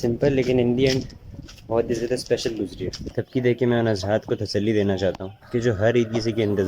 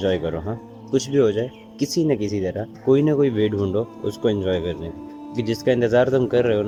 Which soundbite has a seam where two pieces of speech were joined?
first; 1 cut; at 3.2 s

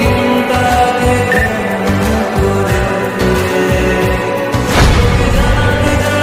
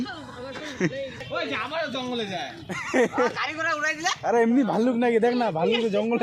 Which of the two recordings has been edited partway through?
second; 1 cut; at 1.2 s

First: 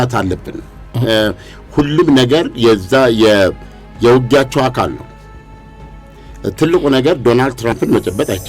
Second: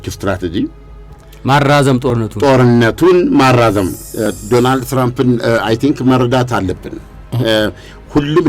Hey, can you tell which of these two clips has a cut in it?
second; 1 cut; at 4.0 s

